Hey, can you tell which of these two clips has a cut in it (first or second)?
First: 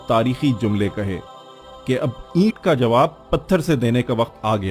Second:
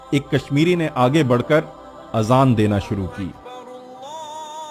first